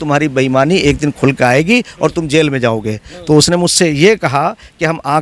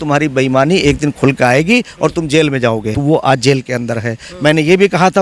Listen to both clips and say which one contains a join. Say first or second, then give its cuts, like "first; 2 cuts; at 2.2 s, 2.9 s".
second; 1 cut; at 3.0 s